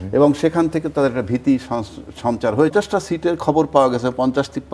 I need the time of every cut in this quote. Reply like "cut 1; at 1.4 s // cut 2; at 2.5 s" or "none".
cut 1; at 2.7 s